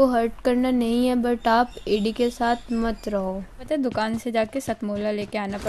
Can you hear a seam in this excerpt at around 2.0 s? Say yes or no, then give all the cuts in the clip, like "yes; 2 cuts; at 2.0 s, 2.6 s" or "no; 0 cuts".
no; 1 cut; at 3.7 s